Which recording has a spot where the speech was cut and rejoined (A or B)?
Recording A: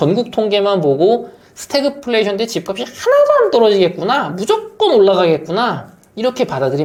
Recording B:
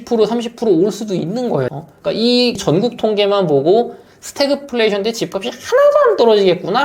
B